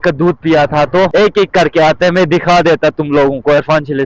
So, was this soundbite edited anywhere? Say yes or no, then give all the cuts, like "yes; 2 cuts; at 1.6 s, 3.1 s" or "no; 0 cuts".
yes; 1 cut; at 1.1 s